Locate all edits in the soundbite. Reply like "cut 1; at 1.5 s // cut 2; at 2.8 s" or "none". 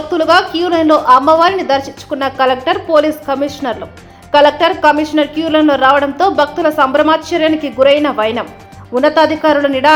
none